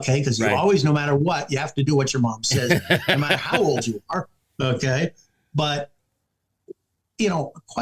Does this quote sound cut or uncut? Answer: uncut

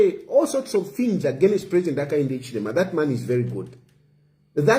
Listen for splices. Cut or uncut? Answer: uncut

